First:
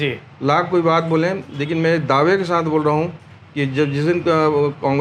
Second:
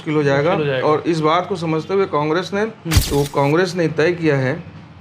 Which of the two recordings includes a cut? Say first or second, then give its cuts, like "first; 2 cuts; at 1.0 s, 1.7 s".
second; 1 cut; at 3.0 s